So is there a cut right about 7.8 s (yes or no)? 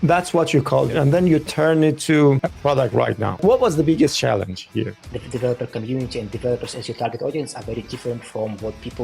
no